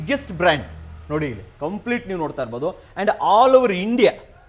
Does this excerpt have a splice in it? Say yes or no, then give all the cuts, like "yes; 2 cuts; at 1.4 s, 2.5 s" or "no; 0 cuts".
no; 0 cuts